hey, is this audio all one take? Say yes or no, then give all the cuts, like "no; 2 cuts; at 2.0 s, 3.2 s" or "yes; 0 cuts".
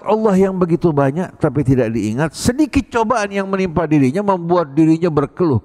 yes; 0 cuts